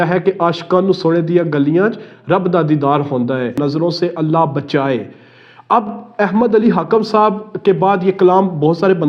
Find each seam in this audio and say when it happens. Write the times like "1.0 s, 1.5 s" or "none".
3.6 s